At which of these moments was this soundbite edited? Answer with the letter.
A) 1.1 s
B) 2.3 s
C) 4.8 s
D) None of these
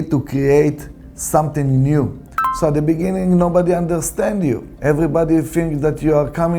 B